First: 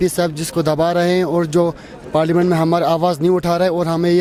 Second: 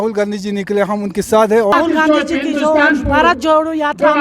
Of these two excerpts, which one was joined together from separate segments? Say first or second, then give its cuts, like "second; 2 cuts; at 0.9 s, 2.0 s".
second; 1 cut; at 1.7 s